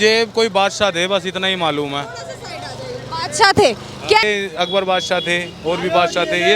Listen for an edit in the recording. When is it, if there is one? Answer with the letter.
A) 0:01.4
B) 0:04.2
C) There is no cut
B